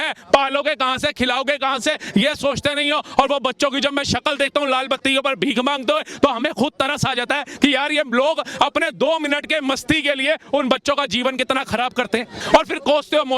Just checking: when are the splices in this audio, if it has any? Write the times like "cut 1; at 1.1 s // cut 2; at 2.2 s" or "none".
cut 1; at 12.4 s